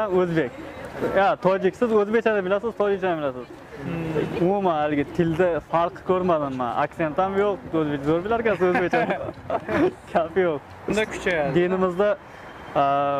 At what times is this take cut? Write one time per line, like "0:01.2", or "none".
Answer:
0:10.9